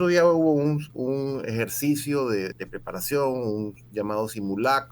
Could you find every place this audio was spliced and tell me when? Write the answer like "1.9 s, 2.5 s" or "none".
2.6 s